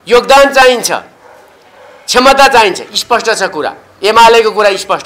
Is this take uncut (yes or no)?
yes